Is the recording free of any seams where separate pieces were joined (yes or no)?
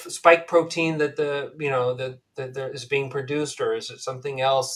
yes